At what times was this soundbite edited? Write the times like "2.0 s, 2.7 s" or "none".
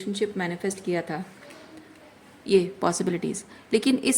none